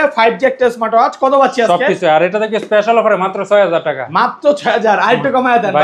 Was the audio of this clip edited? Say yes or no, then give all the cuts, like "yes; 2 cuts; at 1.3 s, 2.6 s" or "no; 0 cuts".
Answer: no; 0 cuts